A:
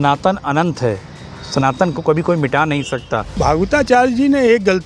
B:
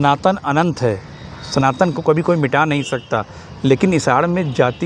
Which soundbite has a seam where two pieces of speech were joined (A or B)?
A